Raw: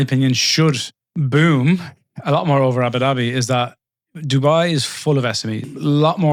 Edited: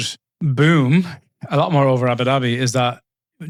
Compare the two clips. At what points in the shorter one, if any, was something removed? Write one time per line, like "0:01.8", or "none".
none